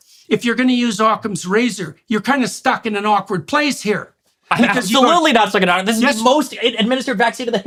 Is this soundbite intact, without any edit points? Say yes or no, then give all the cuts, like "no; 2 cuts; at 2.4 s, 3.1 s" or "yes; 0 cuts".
yes; 0 cuts